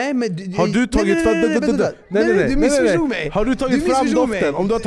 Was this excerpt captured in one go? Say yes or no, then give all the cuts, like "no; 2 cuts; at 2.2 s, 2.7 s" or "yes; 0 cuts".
yes; 0 cuts